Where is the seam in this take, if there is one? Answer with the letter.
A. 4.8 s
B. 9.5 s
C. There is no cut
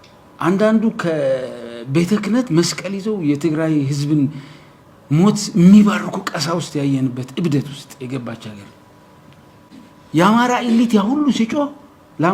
B